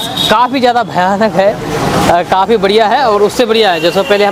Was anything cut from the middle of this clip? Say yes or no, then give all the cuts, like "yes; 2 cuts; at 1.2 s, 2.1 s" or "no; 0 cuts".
no; 0 cuts